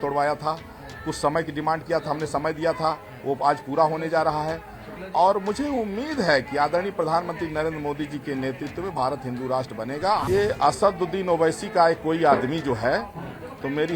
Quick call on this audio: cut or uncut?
cut